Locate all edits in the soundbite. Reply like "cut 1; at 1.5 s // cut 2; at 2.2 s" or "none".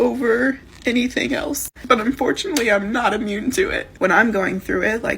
cut 1; at 1.7 s // cut 2; at 3.8 s